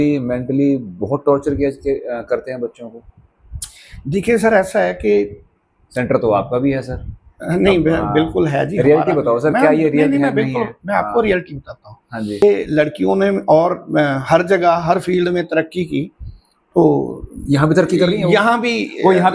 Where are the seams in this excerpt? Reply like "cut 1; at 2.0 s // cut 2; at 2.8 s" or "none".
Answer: cut 1; at 12.4 s